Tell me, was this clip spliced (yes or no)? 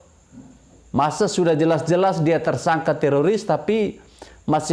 no